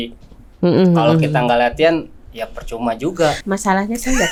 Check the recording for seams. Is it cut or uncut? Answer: uncut